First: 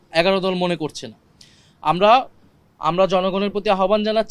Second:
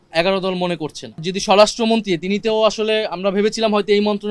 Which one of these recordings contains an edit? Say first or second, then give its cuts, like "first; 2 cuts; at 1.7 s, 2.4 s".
second; 1 cut; at 1.3 s